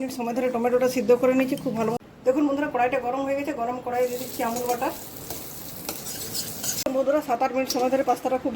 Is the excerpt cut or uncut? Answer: cut